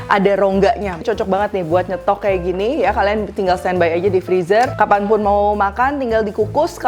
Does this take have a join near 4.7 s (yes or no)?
yes